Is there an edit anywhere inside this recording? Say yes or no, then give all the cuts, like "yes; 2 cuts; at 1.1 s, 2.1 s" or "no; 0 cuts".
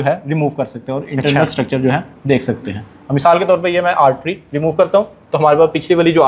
no; 0 cuts